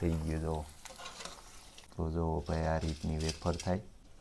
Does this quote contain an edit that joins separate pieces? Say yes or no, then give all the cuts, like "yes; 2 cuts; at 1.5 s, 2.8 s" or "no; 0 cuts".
no; 0 cuts